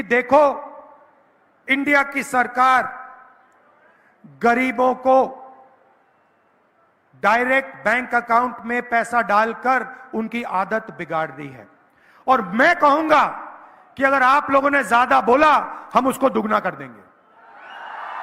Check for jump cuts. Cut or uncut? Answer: uncut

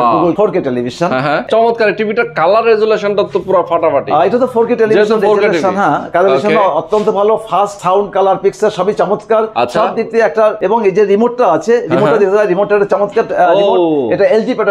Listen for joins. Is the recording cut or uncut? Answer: cut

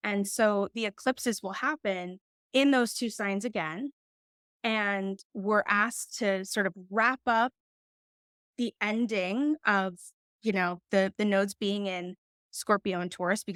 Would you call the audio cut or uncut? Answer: uncut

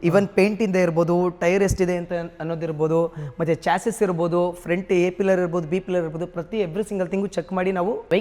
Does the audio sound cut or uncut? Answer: uncut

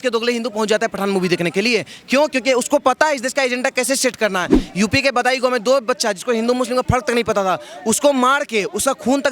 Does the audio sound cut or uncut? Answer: cut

